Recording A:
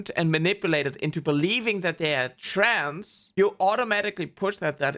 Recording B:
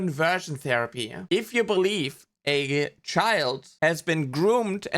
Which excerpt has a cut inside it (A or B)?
B